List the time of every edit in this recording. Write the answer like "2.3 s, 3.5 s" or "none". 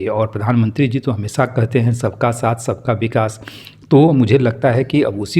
none